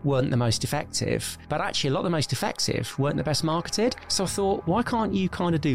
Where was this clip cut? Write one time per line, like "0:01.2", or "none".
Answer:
0:01.3
0:04.0

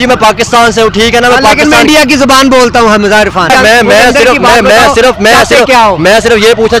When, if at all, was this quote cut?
0:03.5

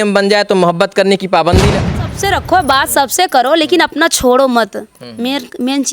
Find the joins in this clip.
0:02.0

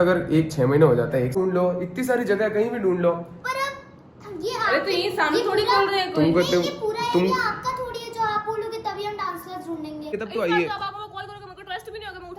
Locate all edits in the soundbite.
0:01.3
0:10.1

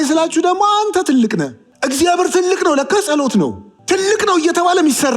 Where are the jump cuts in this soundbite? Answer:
0:01.6
0:03.7

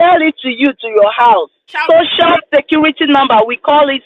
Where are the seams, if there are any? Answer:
0:01.7

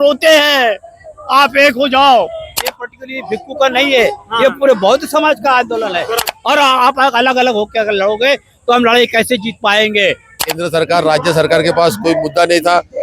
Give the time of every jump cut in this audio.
0:02.7
0:06.3
0:10.5

